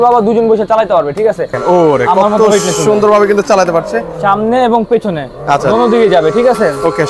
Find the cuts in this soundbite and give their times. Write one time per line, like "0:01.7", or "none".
0:01.6